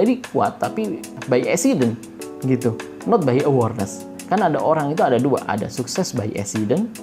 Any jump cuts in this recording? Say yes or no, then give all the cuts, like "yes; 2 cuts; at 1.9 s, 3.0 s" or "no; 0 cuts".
yes; 1 cut; at 1.2 s